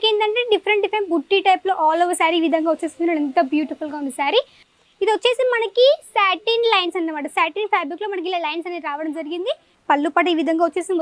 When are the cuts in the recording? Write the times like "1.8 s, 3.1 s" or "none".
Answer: 4.7 s, 9.7 s